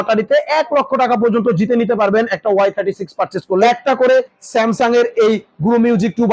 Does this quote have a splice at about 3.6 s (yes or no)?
yes